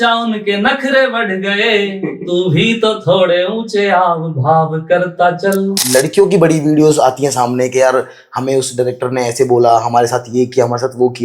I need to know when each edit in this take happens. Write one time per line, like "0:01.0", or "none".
0:05.8